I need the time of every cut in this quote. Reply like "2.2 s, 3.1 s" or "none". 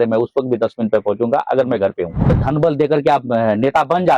2.3 s